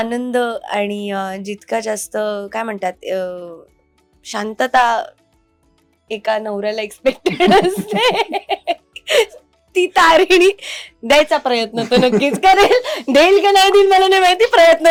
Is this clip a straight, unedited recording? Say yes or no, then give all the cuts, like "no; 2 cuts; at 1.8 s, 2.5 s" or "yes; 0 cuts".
yes; 0 cuts